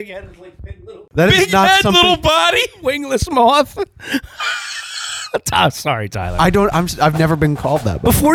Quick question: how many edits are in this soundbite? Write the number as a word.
one